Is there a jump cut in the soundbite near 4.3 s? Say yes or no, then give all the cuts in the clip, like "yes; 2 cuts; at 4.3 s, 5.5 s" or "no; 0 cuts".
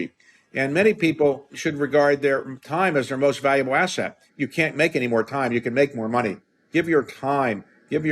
no; 2 cuts; at 1.5 s, 6.6 s